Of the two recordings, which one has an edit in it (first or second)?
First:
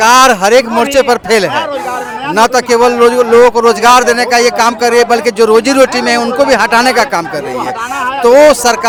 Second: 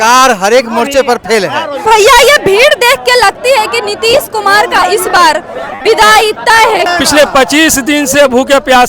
second